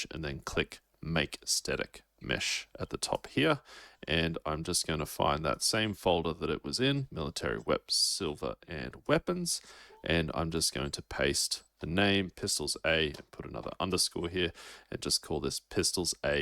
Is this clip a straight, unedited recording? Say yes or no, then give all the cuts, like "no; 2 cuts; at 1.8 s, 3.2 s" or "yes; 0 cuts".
yes; 0 cuts